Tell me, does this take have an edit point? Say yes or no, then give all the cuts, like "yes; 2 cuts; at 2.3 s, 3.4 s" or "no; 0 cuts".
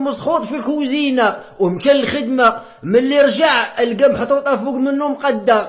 no; 0 cuts